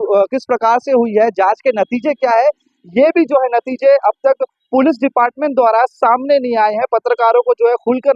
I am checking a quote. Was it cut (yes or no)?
no